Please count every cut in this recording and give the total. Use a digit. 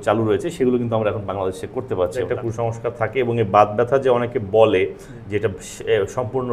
1